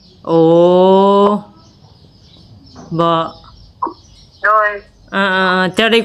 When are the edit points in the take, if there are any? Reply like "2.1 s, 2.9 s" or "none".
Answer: none